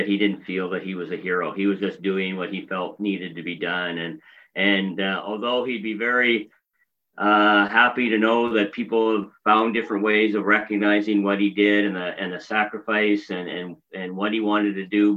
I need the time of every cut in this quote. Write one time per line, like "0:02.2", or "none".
none